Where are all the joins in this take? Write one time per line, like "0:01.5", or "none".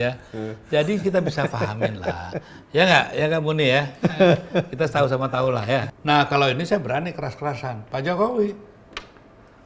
0:05.9

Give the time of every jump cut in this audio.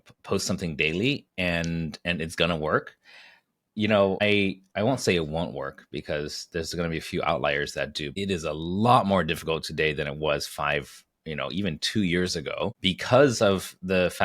0:04.2
0:08.1
0:12.8

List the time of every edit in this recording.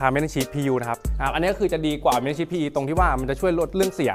0:01.1

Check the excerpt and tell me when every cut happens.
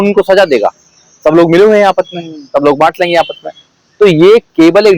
none

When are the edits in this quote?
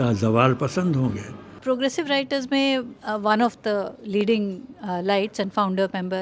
0:01.6

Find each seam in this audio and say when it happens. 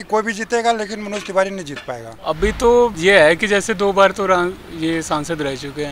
0:02.1
0:03.0

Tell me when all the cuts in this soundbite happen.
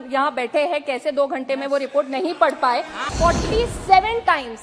0:03.1

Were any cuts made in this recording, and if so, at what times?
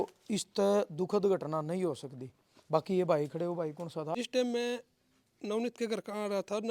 0:04.2

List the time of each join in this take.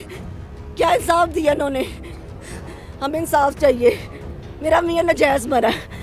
none

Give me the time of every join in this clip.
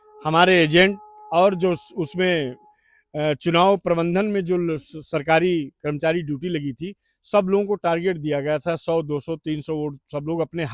none

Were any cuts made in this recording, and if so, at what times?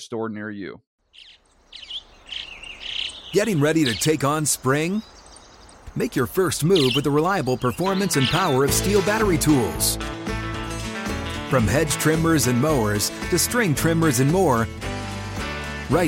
0:00.9

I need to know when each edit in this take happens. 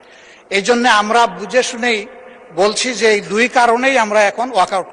none

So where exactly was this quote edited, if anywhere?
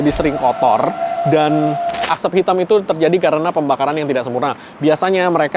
0:02.0

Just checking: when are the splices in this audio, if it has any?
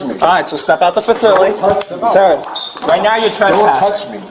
none

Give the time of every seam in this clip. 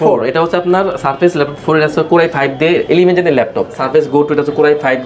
0:03.7

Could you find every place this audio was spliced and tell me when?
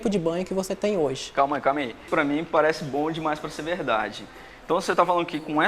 0:02.1

